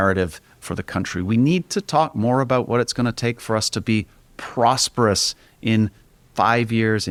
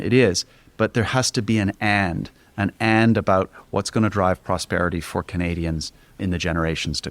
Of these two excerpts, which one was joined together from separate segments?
second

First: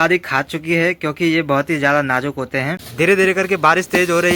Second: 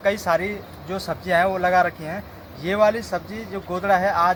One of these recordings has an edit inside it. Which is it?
first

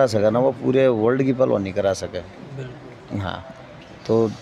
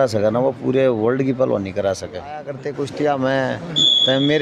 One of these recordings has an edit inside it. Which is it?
second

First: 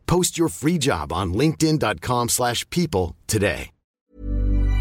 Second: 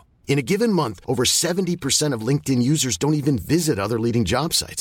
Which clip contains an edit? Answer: first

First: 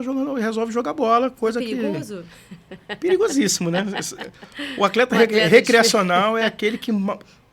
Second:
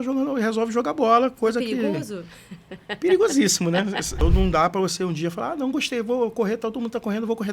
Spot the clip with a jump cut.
second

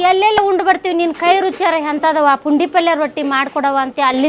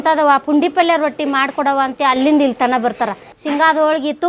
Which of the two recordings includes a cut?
second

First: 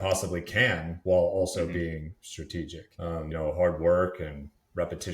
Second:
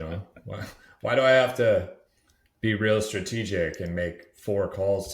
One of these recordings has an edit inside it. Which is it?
first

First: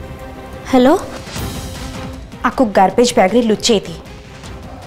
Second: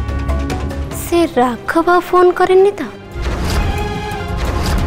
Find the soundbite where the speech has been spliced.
second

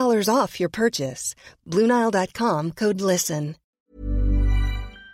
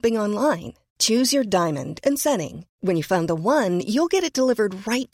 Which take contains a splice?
first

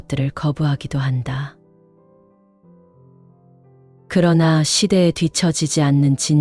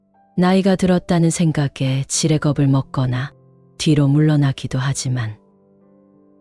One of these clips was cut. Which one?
first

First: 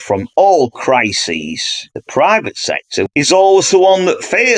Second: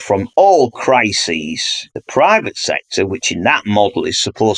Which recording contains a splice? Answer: first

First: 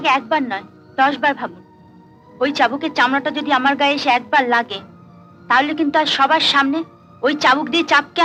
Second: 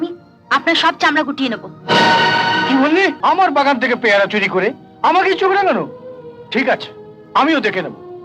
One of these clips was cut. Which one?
second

